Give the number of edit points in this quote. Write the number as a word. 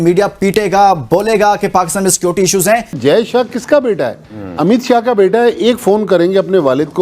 one